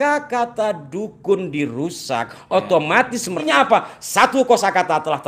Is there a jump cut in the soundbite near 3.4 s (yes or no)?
yes